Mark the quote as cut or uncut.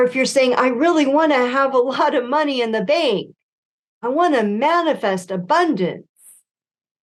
uncut